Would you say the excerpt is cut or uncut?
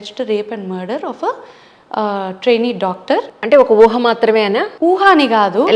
uncut